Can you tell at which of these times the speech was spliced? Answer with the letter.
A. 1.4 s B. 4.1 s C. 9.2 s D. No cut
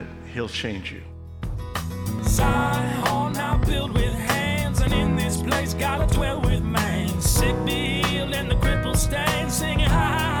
A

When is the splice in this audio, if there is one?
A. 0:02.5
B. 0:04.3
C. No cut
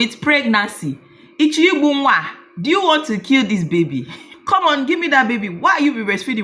B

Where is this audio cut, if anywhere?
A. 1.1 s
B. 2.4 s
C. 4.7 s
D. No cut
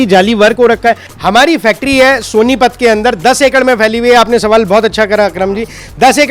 A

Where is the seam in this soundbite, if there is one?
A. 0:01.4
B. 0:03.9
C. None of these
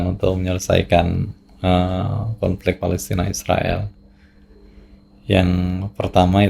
C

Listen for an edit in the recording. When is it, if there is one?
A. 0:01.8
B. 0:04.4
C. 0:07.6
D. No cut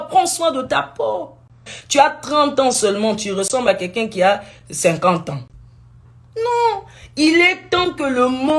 A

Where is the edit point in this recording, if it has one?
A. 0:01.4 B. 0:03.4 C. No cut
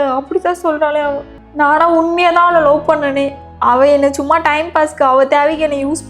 A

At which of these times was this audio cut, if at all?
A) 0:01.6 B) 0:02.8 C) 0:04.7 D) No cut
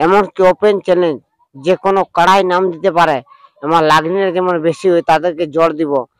D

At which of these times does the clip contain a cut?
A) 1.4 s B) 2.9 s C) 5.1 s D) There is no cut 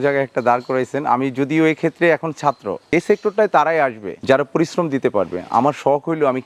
B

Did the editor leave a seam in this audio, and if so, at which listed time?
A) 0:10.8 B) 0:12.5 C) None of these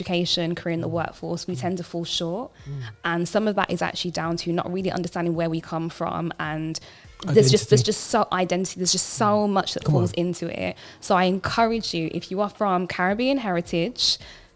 C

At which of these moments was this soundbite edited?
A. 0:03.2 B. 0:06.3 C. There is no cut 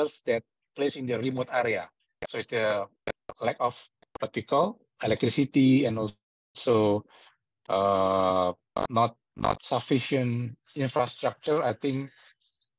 C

